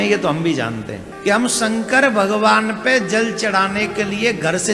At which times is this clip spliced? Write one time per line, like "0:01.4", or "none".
0:01.0